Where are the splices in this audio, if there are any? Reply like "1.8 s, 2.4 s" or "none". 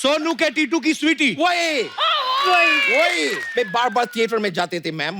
3.5 s